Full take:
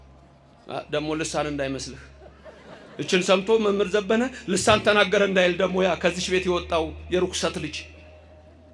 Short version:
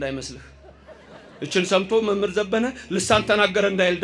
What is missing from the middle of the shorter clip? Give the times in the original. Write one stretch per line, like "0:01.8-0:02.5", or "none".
none